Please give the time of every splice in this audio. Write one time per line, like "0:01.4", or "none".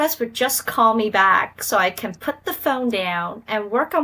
none